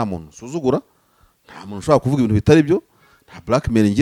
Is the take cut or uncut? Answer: uncut